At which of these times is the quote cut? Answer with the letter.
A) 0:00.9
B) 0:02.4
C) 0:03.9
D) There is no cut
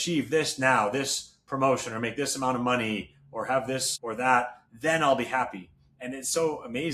C